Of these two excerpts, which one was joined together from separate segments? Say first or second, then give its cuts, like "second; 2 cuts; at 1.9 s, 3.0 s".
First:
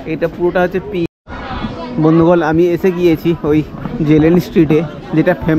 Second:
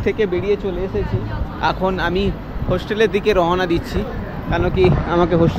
first; 1 cut; at 1.1 s